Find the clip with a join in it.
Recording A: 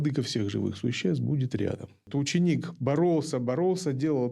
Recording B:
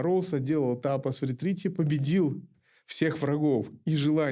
A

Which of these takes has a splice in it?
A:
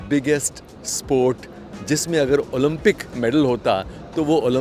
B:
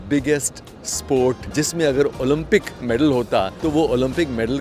B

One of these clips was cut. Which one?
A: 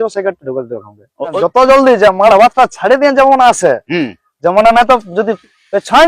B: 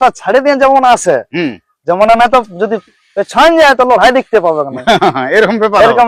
A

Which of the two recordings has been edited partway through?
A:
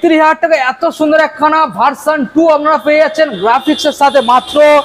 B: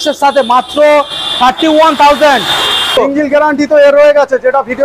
B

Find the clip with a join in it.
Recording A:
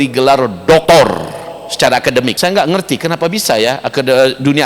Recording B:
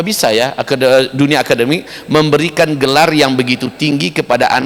A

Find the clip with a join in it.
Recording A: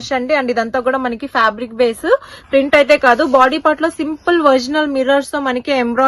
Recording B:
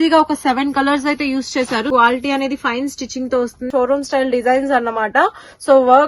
B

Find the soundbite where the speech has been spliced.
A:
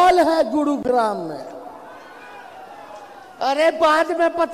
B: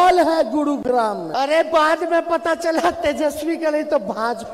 B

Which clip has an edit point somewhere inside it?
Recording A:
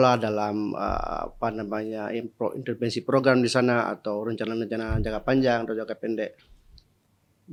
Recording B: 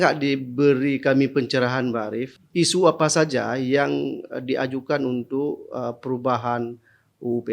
B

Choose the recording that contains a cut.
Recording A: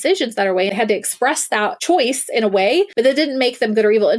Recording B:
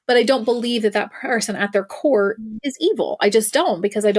A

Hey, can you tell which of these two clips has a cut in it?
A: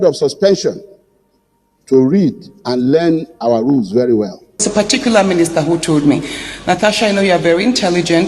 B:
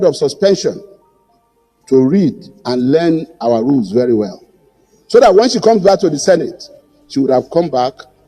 A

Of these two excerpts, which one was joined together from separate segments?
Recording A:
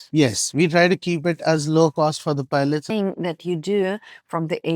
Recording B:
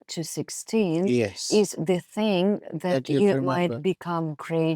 A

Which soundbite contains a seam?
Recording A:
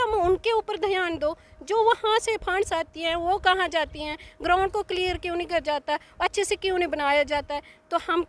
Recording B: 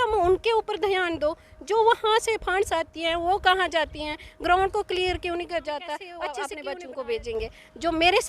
B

